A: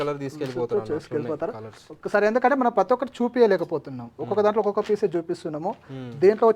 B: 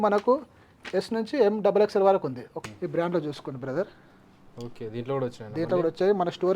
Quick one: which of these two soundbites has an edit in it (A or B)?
B